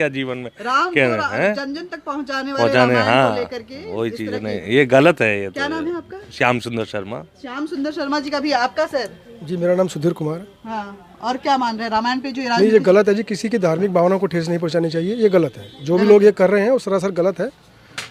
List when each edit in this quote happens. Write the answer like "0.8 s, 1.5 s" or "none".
none